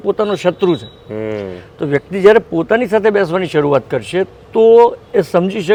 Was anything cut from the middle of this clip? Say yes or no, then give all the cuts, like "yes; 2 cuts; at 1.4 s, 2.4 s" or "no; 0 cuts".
no; 0 cuts